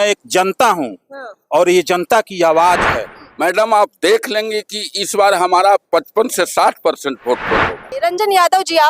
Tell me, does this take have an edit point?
yes; 2 cuts; at 3.2 s, 7.9 s

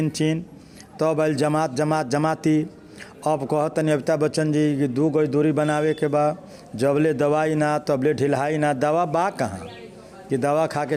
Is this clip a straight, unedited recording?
yes; 0 cuts

